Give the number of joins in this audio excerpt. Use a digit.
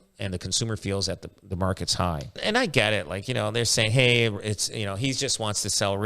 1